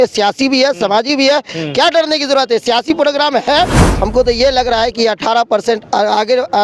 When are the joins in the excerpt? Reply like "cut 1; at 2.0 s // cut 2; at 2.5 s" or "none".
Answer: cut 1; at 3.8 s